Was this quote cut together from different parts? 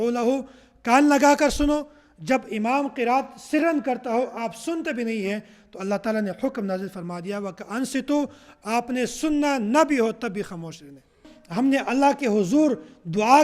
yes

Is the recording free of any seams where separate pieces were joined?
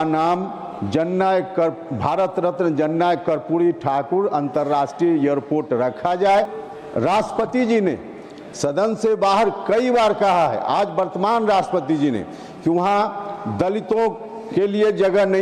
no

